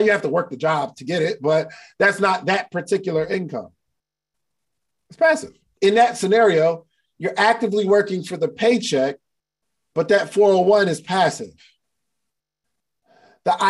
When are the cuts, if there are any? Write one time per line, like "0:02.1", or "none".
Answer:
0:05.6